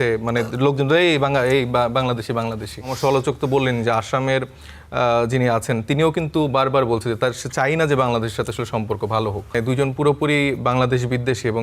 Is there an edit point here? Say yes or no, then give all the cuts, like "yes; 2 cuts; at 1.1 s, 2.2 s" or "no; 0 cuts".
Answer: yes; 2 cuts; at 2.9 s, 9.5 s